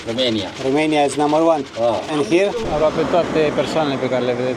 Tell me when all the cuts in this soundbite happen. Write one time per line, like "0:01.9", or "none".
0:02.6